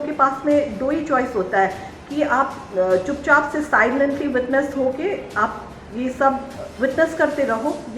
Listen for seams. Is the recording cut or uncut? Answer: cut